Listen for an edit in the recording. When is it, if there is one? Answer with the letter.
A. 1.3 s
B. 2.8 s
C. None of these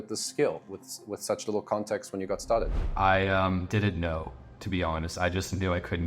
B